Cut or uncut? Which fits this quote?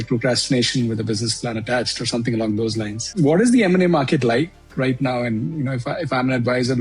uncut